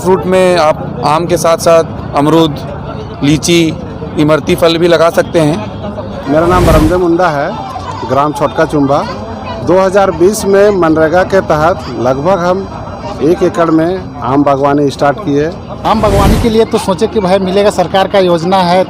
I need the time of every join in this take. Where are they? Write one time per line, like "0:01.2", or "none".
0:06.2
0:15.8